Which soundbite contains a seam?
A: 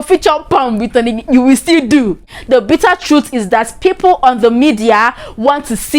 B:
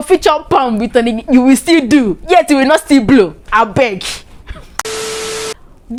A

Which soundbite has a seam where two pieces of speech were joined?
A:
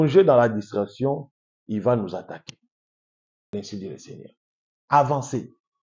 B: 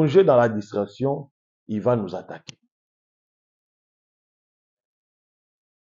A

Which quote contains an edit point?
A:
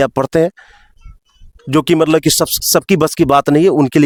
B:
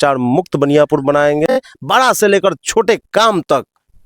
B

